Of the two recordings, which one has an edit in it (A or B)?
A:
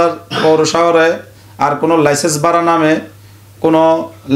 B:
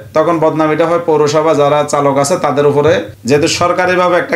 B